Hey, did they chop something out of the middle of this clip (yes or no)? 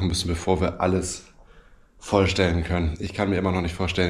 no